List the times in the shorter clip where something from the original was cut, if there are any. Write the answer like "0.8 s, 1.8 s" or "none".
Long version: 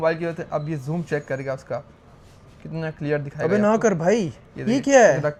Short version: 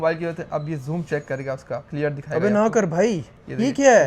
1.9 s